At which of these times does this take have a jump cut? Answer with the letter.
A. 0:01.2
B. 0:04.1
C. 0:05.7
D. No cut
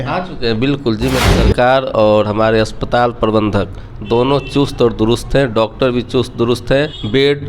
A